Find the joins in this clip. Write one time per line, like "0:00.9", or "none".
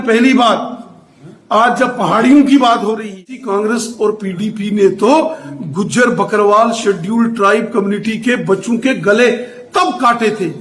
0:03.4